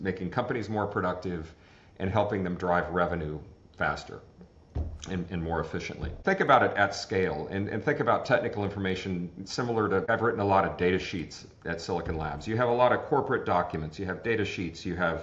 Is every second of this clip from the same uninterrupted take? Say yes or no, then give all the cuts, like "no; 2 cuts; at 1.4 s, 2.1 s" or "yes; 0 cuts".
no; 2 cuts; at 6.2 s, 10.1 s